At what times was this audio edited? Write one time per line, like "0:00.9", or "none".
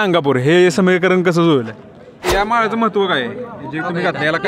0:02.2